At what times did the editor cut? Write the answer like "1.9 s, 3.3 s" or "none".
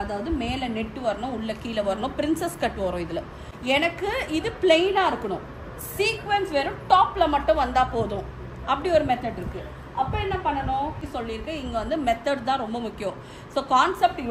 3.5 s, 11.0 s